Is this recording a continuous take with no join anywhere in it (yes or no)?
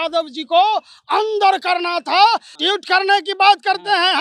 no